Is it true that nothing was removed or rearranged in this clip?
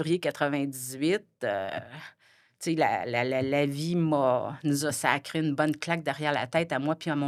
yes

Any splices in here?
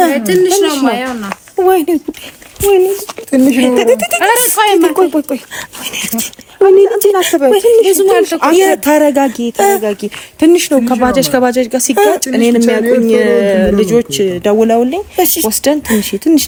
no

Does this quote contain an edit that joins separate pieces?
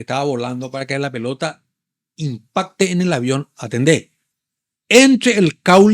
no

